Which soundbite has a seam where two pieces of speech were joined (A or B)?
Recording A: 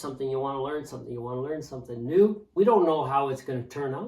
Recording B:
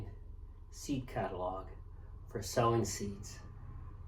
A